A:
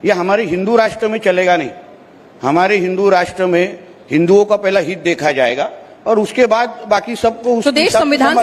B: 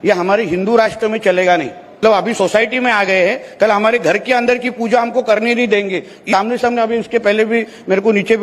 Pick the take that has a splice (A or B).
B